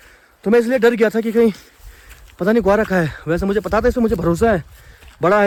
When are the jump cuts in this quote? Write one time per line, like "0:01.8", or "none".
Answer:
none